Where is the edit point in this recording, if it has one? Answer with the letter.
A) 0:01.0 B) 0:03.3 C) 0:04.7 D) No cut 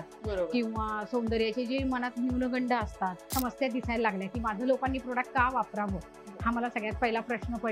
B